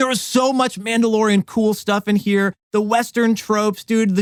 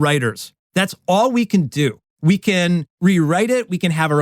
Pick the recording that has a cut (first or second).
second